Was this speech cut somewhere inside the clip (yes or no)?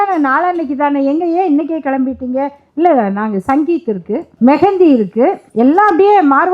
yes